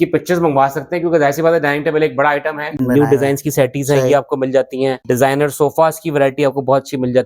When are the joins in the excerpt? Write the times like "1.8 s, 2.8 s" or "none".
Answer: 2.8 s, 5.0 s